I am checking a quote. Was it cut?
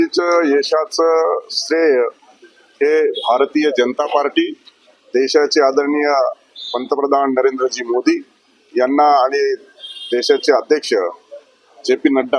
no; 0 cuts

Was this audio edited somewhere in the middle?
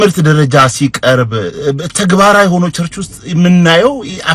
no; 0 cuts

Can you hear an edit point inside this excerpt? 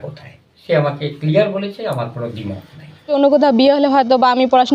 yes; 1 cut; at 3.1 s

